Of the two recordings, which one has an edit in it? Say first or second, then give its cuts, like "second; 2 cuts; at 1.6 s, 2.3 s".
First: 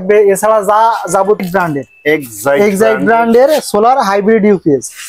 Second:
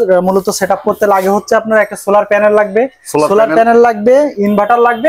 first; 1 cut; at 1.4 s